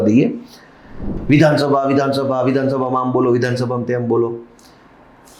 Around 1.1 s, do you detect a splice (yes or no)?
yes